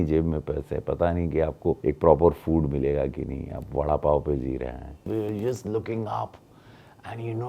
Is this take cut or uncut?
cut